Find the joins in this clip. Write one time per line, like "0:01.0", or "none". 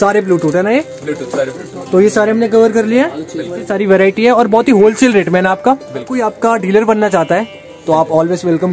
0:03.6
0:06.1